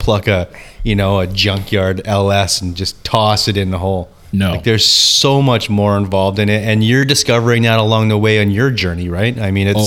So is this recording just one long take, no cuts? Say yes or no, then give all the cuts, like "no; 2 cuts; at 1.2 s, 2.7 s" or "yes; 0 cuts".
no; 2 cuts; at 7.0 s, 8.8 s